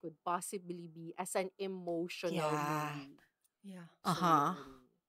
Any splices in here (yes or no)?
no